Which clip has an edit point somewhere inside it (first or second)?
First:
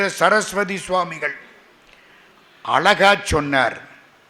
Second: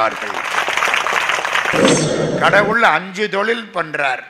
second